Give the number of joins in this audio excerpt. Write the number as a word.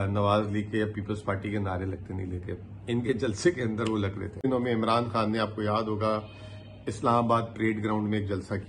one